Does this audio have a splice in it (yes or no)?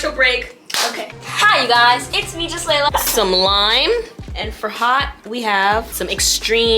yes